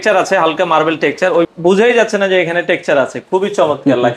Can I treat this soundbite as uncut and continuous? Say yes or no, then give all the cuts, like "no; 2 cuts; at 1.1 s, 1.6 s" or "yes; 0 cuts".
no; 1 cut; at 1.5 s